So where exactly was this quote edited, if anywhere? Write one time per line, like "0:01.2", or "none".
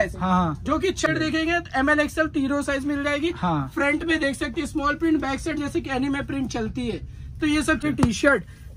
0:01.1
0:07.8